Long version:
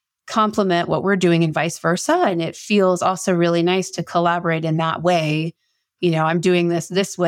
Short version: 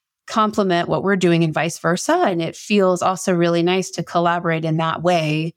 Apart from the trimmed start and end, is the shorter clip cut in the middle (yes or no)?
no